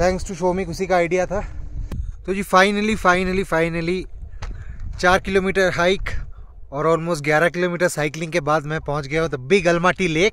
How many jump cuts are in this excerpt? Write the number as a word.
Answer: one